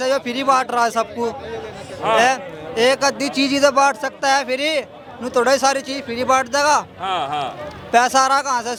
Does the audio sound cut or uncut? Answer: uncut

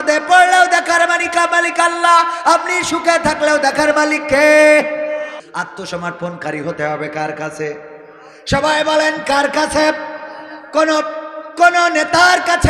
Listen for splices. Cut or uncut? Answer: cut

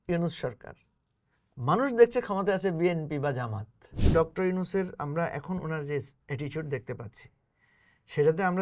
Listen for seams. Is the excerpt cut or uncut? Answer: cut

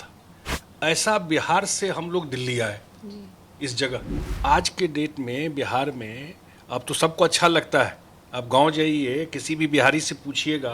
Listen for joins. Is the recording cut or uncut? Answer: cut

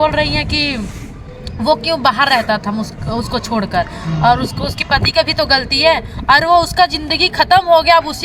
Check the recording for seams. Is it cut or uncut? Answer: uncut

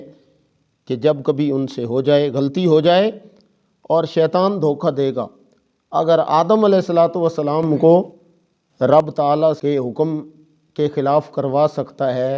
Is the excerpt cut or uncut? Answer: cut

